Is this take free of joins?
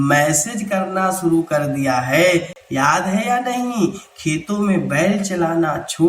yes; 0 cuts

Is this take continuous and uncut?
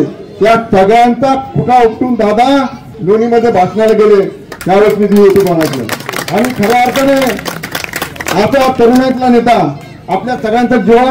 yes; 0 cuts

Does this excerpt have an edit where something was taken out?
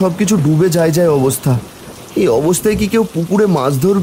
no; 0 cuts

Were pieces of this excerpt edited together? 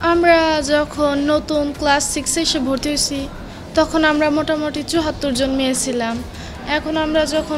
no; 0 cuts

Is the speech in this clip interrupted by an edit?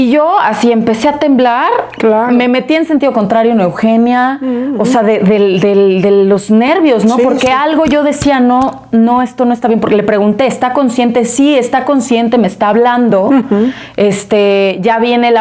no; 0 cuts

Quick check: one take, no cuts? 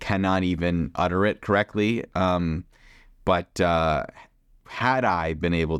yes; 0 cuts

